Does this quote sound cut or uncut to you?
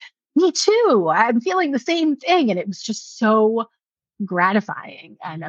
uncut